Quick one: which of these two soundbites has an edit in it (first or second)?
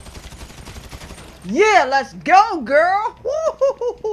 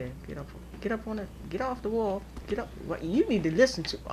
first